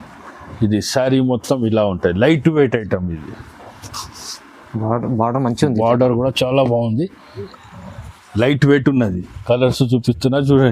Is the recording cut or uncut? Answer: cut